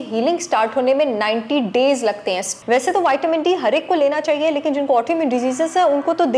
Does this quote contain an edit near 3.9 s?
no; 1 cut; at 2.5 s

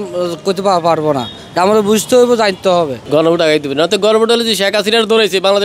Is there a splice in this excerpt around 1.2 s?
no; 1 cut; at 3.0 s

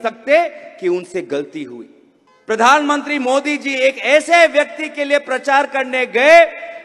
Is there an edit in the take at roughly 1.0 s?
no; 1 cut; at 2.4 s

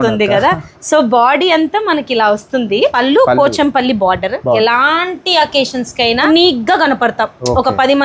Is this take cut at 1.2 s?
no; 3 cuts; at 2.9 s, 4.6 s, 6.3 s

